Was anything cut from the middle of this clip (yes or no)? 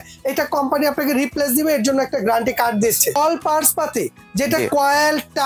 yes